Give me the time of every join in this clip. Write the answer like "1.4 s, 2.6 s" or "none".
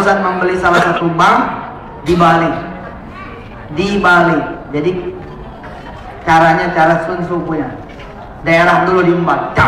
none